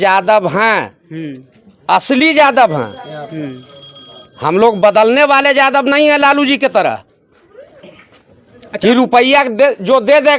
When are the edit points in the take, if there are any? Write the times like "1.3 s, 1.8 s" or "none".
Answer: none